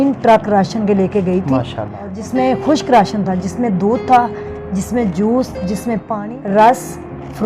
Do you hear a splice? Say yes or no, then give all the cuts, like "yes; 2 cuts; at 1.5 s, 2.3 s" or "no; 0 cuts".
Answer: yes; 2 cuts; at 2.1 s, 6.1 s